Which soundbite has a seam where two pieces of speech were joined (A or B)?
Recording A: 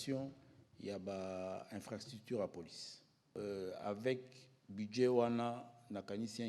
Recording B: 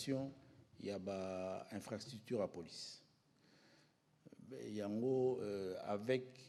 A